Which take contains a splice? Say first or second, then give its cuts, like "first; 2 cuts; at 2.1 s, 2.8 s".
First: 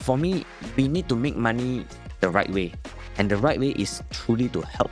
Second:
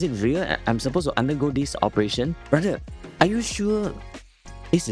second; 1 cut; at 2.4 s